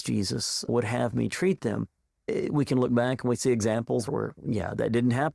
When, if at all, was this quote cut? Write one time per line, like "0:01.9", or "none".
0:02.2